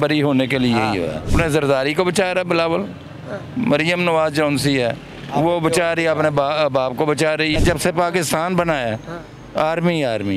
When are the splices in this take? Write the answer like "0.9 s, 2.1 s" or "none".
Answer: 1.3 s, 7.6 s